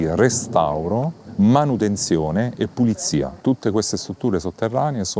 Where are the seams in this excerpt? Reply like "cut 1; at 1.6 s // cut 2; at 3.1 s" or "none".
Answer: cut 1; at 1.2 s // cut 2; at 3.3 s